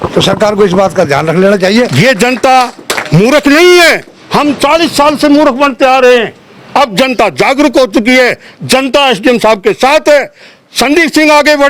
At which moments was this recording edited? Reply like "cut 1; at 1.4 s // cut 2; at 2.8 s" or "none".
cut 1; at 1.9 s